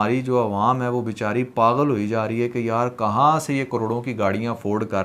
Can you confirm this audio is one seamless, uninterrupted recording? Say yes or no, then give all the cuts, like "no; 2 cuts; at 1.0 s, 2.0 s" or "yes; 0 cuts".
yes; 0 cuts